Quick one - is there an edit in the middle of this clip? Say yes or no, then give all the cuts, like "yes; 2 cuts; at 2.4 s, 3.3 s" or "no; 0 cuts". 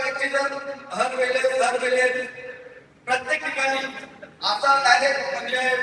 no; 0 cuts